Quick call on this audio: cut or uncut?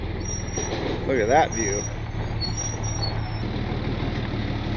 uncut